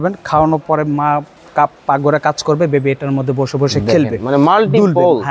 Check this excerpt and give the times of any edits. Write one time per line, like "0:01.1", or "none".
none